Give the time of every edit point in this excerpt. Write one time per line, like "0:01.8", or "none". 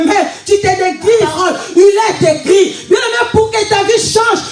0:01.4